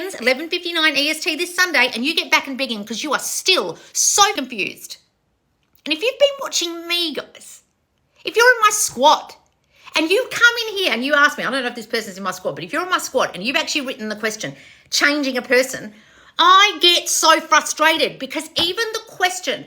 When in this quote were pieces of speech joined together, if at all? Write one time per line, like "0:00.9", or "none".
0:04.3